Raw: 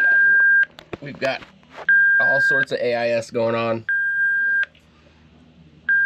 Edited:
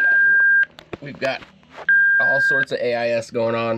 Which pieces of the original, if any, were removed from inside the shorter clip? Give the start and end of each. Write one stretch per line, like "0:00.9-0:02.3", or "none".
none